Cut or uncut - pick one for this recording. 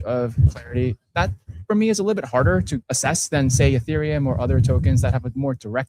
cut